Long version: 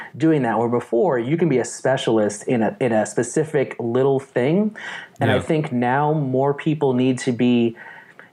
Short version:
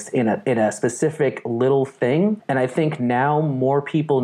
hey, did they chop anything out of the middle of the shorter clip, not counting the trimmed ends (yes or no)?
yes